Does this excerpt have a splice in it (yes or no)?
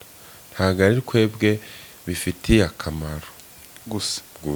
no